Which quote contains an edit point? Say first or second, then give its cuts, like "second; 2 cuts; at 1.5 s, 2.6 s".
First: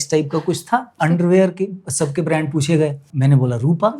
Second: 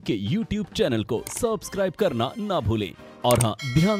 first; 2 cuts; at 0.9 s, 3.1 s